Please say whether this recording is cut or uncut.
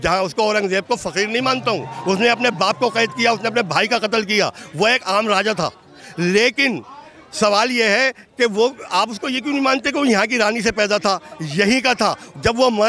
uncut